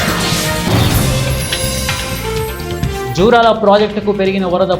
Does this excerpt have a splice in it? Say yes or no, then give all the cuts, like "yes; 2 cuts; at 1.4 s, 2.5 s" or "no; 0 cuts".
yes; 1 cut; at 3.0 s